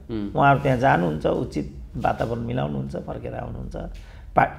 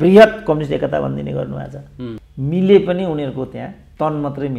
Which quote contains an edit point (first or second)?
second